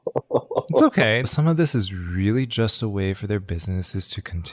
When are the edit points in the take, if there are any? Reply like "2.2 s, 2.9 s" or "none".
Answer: 1.3 s

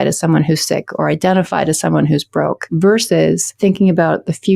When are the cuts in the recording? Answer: 2.6 s, 3.5 s

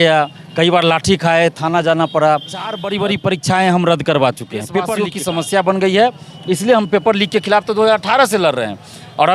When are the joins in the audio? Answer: 2.8 s, 5.0 s

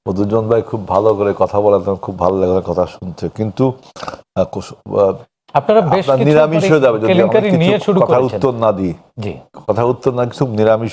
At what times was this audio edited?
none

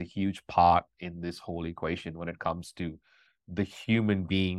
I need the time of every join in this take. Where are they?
none

